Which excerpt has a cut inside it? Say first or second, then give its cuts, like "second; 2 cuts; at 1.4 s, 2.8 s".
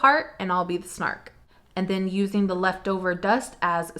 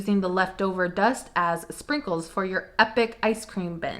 first; 1 cut; at 1.3 s